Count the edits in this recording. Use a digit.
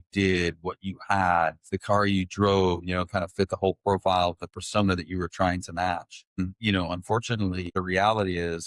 3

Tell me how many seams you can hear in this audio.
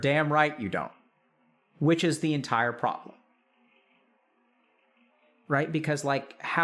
0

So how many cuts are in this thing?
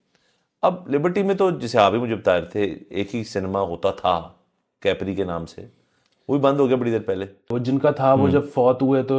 1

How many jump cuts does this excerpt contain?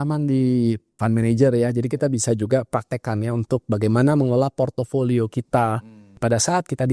1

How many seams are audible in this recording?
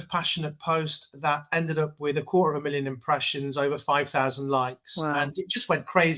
0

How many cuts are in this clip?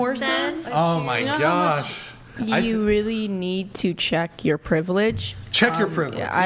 1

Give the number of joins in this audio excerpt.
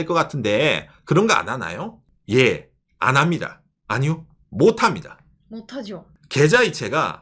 2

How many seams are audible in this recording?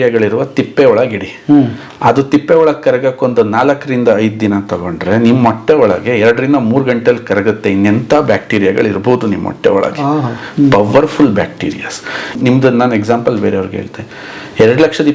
1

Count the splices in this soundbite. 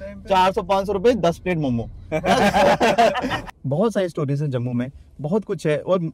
1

